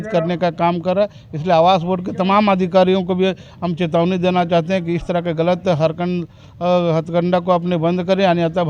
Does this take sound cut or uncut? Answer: uncut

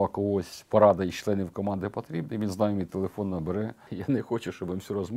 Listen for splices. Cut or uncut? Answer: cut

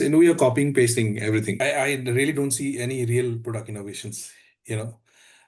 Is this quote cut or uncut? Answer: cut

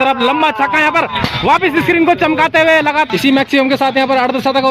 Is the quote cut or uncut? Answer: cut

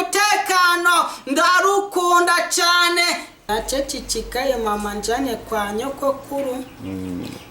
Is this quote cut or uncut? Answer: cut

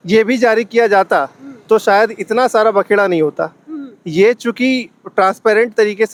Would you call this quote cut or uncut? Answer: uncut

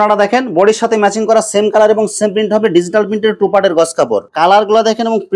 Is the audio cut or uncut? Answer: cut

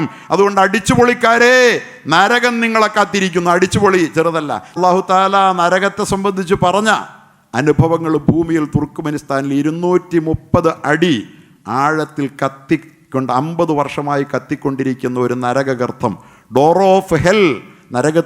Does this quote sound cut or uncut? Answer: cut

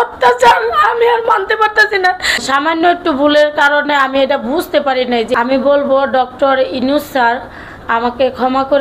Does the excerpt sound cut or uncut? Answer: cut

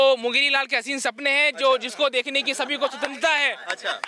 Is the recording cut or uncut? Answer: uncut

